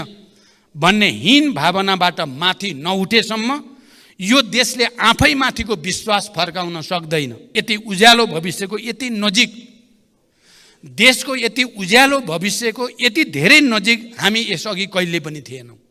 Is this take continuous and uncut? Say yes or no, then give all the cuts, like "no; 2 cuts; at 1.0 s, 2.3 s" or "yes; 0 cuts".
no; 1 cut; at 7.5 s